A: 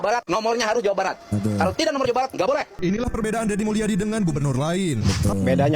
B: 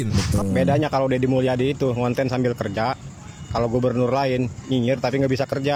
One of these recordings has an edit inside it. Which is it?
A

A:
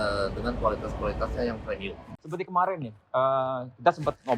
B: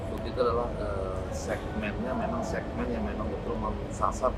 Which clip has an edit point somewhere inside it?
A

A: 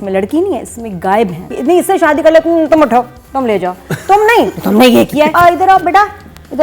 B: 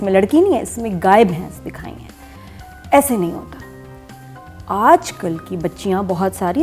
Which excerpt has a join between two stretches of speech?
A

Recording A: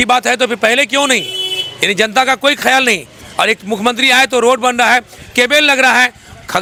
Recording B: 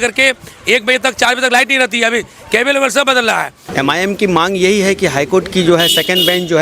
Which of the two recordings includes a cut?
B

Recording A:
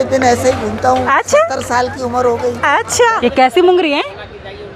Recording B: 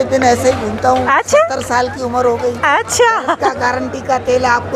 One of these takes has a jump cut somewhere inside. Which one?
A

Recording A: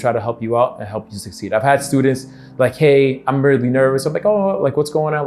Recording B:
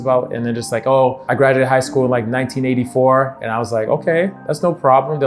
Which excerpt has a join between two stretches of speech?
B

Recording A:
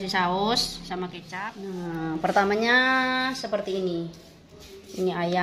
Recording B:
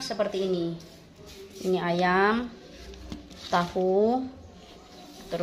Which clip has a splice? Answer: A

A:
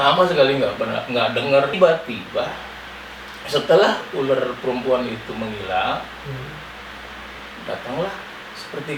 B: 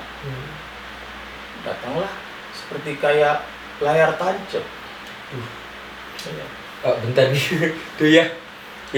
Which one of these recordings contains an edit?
A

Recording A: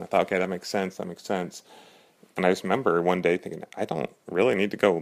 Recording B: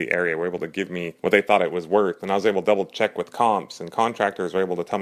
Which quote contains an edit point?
B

